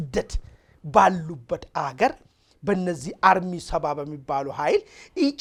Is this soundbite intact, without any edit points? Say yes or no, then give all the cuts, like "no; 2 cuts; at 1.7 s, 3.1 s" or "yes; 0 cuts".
yes; 0 cuts